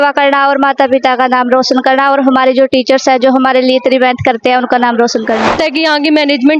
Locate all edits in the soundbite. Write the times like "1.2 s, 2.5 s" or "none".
5.5 s